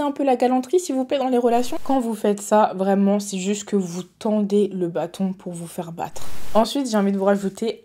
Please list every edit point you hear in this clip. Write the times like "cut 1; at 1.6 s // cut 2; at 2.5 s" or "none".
cut 1; at 1.8 s // cut 2; at 6.3 s